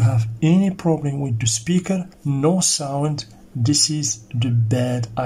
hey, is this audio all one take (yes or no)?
no